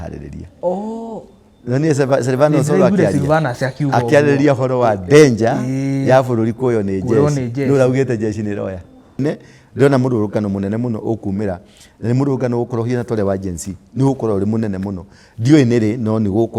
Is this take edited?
yes; 1 cut; at 9.2 s

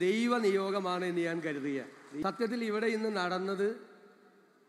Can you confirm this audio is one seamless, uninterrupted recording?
no; 1 cut; at 2.2 s

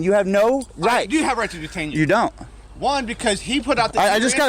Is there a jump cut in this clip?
no; 0 cuts

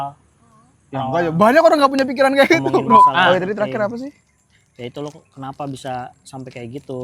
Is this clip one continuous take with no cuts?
no; 1 cut; at 3.1 s

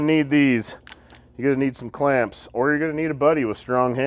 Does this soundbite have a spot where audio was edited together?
no; 0 cuts

